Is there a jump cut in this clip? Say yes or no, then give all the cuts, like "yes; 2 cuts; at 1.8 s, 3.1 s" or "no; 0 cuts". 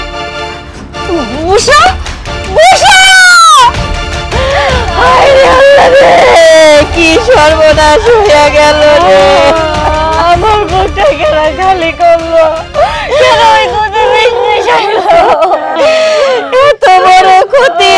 yes; 1 cut; at 15.7 s